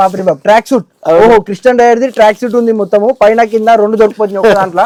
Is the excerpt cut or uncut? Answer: uncut